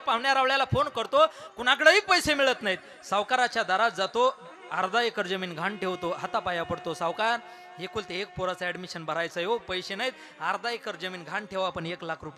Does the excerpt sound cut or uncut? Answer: uncut